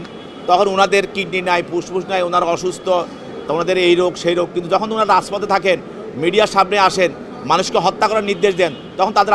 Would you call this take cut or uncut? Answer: uncut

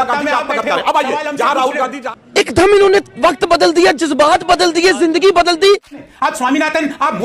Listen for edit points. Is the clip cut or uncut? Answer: uncut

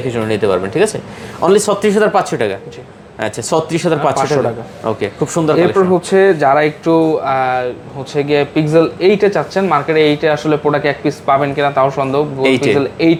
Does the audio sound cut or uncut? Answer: uncut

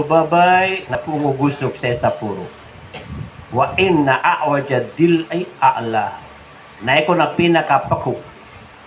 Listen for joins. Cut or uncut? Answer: cut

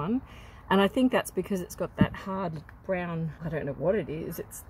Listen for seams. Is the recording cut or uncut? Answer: cut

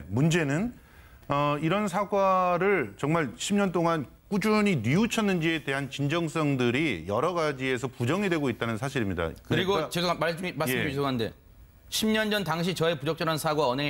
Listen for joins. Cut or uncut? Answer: cut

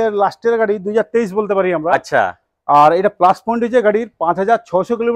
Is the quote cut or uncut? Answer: uncut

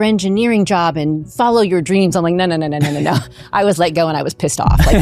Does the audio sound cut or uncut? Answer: uncut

